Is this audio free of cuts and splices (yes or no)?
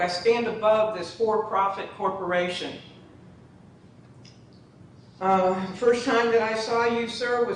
yes